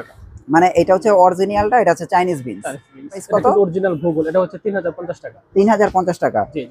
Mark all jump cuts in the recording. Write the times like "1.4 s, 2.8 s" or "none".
3.3 s